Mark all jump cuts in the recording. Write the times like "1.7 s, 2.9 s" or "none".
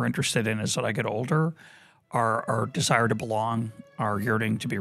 none